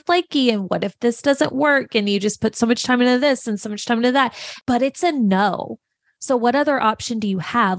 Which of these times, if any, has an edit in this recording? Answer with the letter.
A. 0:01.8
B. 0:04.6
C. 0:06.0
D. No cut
B